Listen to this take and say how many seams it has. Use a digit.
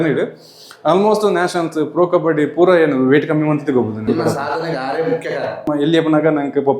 2